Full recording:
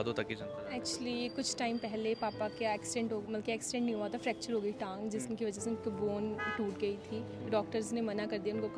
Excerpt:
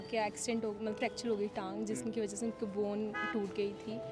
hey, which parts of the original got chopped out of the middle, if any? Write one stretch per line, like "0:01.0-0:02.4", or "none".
0:03.4-0:04.2